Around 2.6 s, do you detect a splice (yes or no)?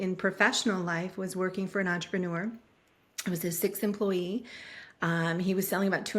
no